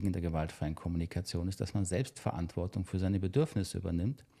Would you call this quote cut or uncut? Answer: uncut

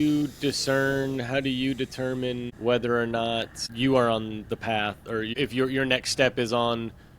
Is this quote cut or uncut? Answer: cut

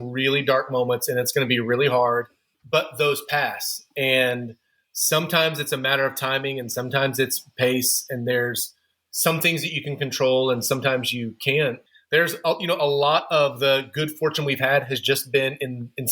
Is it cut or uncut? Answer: cut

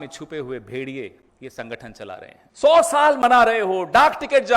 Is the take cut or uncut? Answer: cut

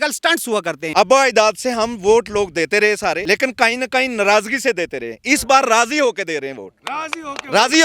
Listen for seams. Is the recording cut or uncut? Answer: cut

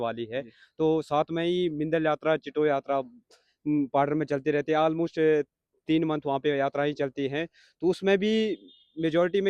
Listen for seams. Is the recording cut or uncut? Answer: uncut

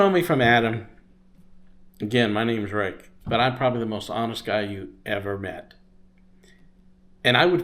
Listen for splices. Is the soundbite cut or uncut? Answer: uncut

